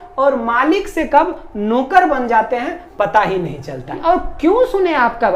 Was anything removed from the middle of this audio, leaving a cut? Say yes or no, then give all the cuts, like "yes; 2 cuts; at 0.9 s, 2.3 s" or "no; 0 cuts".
yes; 1 cut; at 4.0 s